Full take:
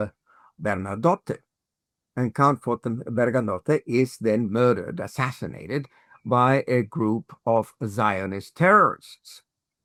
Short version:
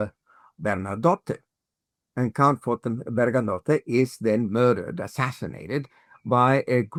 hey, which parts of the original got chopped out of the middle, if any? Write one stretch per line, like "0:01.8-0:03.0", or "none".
none